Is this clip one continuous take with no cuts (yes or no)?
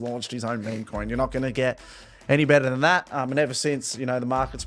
yes